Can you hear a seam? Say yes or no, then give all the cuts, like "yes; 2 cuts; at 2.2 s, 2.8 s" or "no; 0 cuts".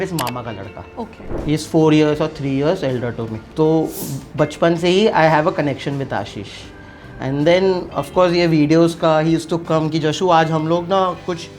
yes; 2 cuts; at 1.3 s, 3.4 s